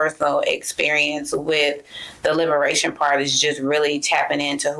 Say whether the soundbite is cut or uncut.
uncut